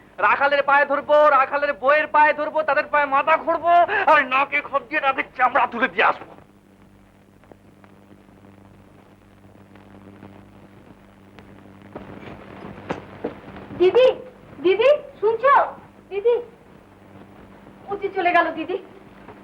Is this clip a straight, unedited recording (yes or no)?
yes